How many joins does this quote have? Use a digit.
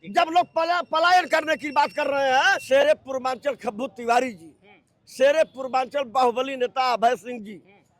1